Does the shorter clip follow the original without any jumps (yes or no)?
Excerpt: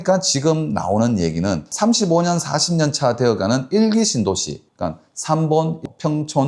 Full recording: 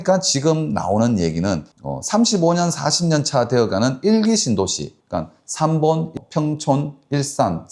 no